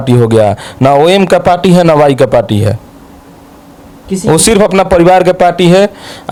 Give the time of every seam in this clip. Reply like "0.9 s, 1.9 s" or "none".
none